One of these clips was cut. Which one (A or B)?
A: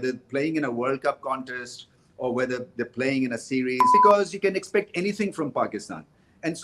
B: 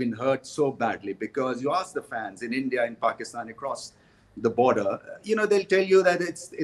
A